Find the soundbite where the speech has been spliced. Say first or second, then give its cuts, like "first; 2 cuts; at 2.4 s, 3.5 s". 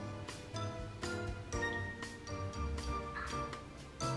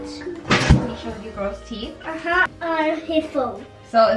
second; 1 cut; at 2.5 s